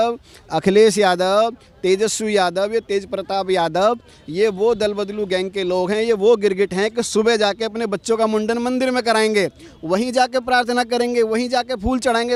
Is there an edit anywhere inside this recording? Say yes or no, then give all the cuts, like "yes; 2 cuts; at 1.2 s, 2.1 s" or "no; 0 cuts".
no; 0 cuts